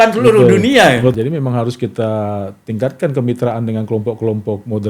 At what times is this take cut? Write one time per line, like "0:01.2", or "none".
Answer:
0:01.1